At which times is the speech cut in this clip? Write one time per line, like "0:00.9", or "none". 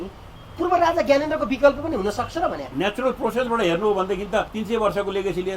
0:02.6
0:04.6